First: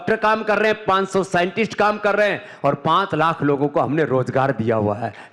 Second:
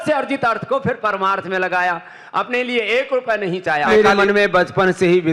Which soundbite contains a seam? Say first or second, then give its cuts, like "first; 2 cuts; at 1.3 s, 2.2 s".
second; 1 cut; at 3.9 s